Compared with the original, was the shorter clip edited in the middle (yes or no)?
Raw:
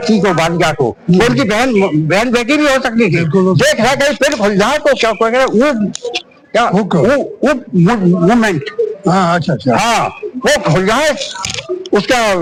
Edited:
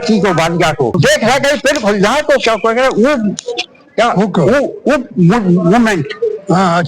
yes